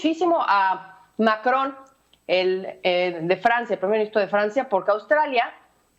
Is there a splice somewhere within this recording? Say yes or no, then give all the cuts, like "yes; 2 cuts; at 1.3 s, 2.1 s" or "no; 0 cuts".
no; 0 cuts